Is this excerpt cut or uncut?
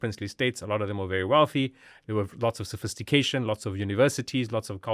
uncut